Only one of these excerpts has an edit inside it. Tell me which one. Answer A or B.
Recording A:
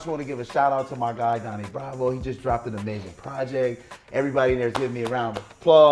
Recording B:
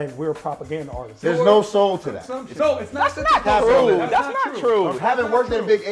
B